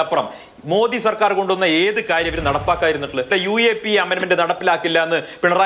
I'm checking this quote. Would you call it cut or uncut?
cut